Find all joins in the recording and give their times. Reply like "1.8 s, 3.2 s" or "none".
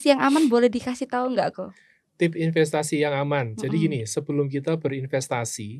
none

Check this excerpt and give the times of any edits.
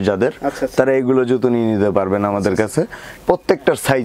3.1 s

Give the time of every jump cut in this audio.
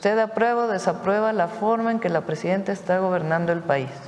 none

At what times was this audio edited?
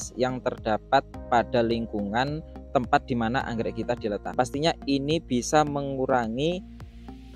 4.3 s

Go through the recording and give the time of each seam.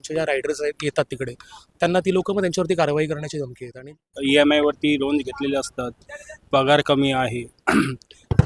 4.1 s

